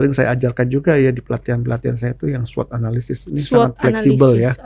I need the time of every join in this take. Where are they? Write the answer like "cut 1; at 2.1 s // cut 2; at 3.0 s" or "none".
none